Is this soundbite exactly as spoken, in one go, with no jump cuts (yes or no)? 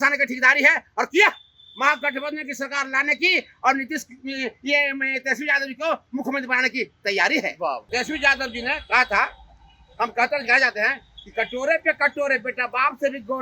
no